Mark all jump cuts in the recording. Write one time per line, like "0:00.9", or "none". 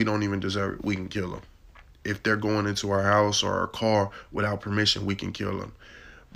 none